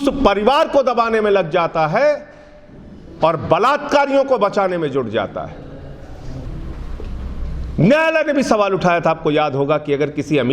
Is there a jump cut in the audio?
yes; 1 cut; at 6.5 s

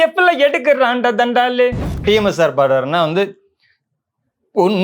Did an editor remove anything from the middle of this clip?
yes; 1 cut; at 1.9 s

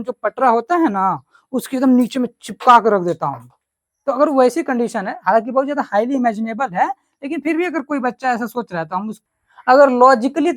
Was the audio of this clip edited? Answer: yes; 1 cut; at 9.2 s

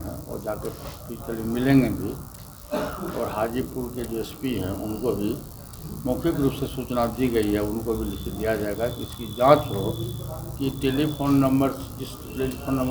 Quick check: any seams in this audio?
no; 0 cuts

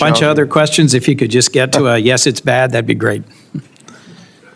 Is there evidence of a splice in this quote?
no; 0 cuts

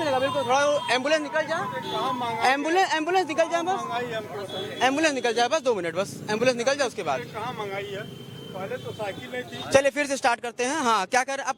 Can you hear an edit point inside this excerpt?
no; 0 cuts

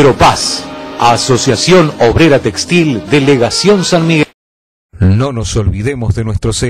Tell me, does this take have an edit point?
yes; 1 cut; at 4.2 s

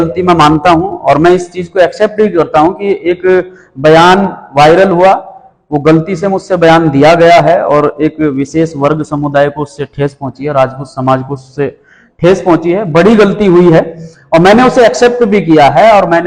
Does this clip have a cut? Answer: no; 0 cuts

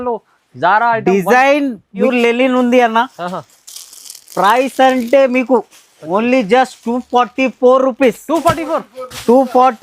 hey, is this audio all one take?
no; 1 cut; at 2.1 s

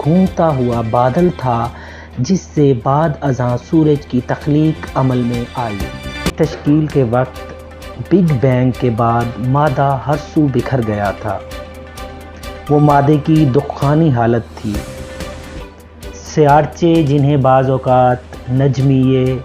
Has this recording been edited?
yes; 2 cuts; at 6.3 s, 15.6 s

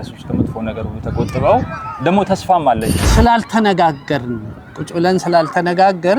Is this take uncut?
no; 1 cut; at 3.0 s

